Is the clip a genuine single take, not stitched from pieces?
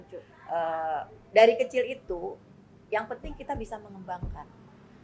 yes; 0 cuts

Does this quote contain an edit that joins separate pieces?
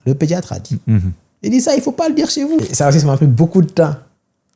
yes; 1 cut; at 2.6 s

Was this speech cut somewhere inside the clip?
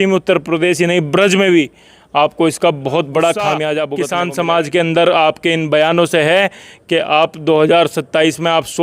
yes; 1 cut; at 4.0 s

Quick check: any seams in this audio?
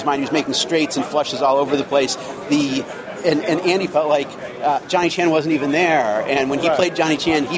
no; 0 cuts

